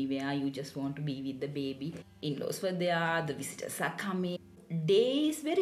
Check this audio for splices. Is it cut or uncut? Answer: cut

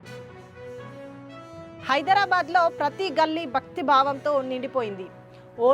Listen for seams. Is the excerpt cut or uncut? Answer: cut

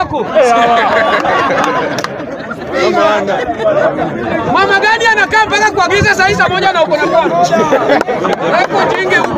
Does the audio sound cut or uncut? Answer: uncut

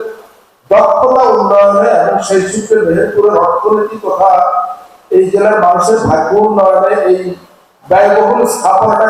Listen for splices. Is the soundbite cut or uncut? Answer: uncut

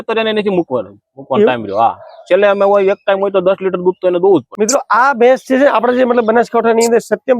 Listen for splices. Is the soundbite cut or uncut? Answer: cut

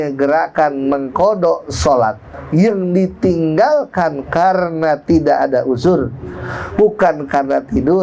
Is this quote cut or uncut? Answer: cut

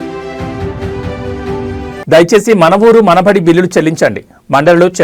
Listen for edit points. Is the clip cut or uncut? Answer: uncut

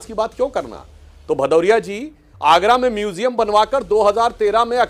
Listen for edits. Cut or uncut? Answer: uncut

